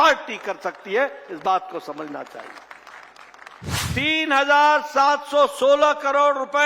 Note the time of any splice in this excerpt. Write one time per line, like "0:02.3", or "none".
0:03.8